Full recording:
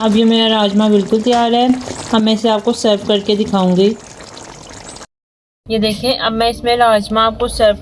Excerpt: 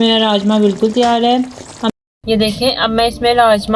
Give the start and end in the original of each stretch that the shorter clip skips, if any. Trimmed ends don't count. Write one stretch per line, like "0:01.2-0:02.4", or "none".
0:02.2-0:05.3